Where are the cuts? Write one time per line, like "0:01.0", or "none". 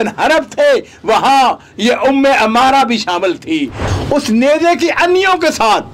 0:03.8